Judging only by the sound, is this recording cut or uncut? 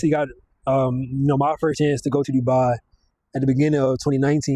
uncut